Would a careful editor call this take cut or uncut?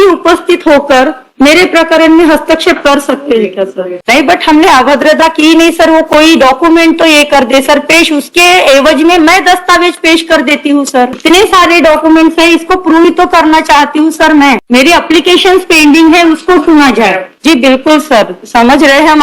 cut